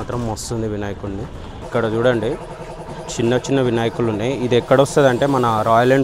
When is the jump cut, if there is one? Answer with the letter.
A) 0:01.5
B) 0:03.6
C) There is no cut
A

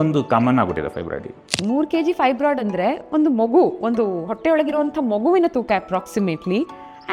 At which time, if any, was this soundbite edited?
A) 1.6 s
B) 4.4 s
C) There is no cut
A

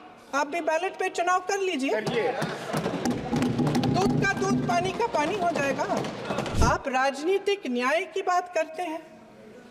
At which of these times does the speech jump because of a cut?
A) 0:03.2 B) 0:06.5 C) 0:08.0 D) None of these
B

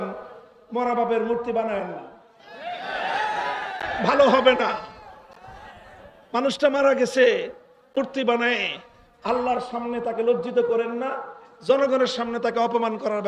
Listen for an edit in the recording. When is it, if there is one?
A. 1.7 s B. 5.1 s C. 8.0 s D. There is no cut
C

